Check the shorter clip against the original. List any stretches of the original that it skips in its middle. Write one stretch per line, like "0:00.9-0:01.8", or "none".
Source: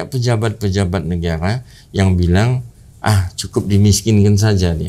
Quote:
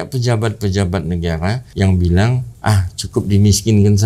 0:01.6-0:01.8
0:02.6-0:02.9

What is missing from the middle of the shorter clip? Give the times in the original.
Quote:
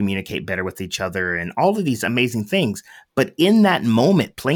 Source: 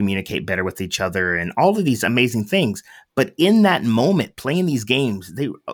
none

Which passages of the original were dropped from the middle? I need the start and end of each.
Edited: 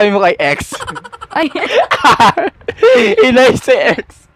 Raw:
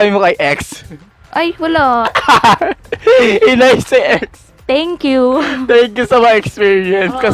0:01.7-0:02.0

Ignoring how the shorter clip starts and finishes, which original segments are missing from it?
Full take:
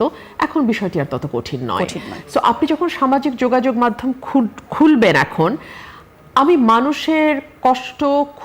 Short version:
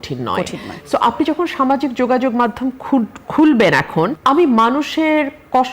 0:05.6-0:06.3

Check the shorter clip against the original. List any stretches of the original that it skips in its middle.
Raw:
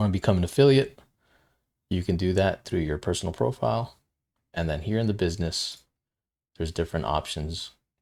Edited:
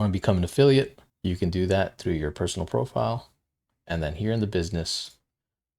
0:01.1-0:01.7

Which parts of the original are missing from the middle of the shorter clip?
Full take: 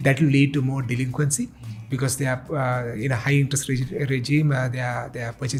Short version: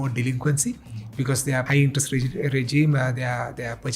0:02.4-0:03.2

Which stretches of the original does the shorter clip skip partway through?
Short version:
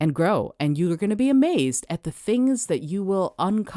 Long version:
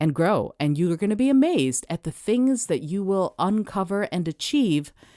none

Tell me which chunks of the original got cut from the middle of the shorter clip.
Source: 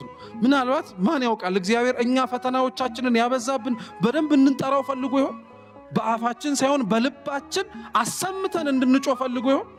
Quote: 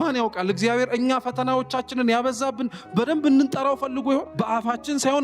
0:05.4-0:05.9

